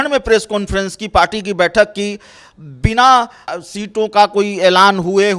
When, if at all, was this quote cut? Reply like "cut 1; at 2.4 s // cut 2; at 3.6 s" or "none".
cut 1; at 3.5 s